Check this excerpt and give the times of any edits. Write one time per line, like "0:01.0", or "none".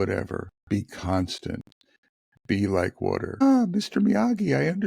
0:03.4